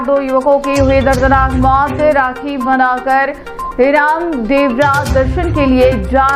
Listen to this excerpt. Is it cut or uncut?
uncut